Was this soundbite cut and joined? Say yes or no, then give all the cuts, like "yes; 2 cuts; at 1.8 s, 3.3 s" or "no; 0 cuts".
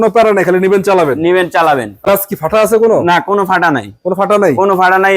yes; 1 cut; at 2.1 s